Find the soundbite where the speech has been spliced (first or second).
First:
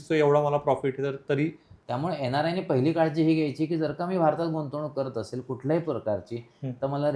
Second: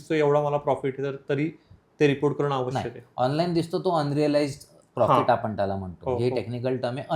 first